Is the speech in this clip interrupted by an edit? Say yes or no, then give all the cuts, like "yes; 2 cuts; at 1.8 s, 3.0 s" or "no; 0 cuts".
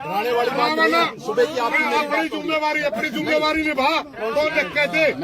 no; 0 cuts